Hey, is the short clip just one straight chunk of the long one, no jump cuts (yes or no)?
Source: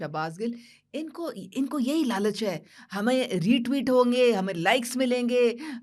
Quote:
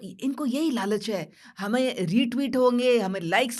yes